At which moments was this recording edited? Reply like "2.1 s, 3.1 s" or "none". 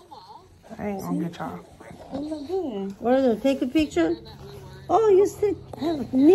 none